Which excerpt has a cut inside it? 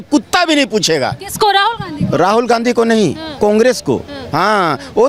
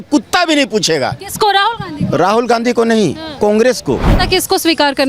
second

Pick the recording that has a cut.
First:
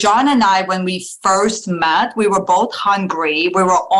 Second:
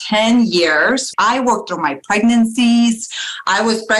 second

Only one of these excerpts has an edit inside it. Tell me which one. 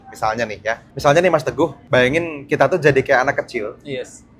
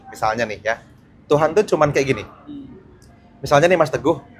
first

